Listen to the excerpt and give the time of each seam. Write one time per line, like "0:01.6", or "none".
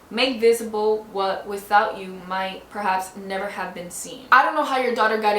0:04.2

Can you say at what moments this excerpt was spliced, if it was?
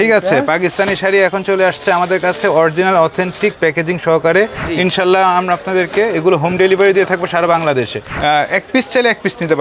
0:04.6
0:08.1

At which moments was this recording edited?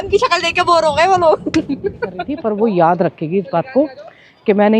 0:02.3

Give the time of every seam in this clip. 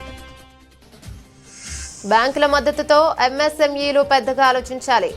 0:01.7

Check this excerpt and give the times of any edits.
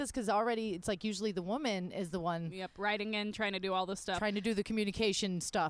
none

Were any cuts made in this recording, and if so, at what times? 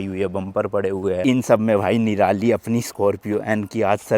0:01.2

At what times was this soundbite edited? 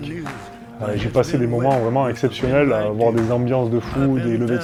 none

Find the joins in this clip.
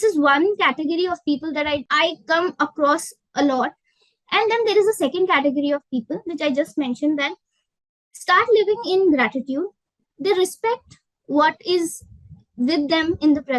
0:01.9

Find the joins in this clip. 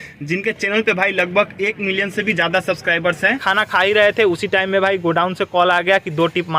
0:03.4

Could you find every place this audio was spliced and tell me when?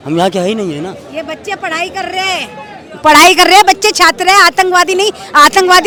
none

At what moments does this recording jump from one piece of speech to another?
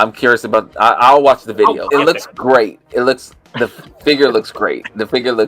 0:01.8

